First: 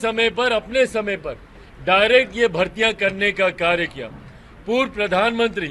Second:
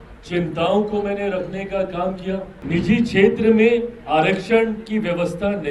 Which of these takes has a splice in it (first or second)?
second